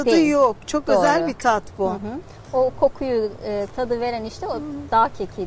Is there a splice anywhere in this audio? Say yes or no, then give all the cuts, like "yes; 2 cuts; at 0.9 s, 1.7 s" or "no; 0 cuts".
no; 0 cuts